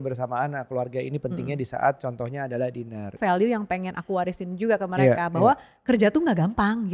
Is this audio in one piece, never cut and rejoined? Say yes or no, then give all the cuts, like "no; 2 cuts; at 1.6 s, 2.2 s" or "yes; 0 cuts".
no; 1 cut; at 3.2 s